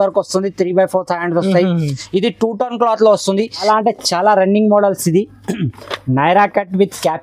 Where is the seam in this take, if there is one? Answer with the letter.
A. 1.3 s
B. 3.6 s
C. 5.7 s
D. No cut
B